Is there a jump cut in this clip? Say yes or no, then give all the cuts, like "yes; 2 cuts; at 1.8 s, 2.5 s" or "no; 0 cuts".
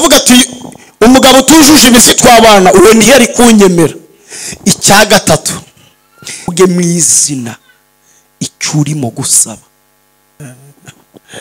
yes; 2 cuts; at 6.5 s, 10.4 s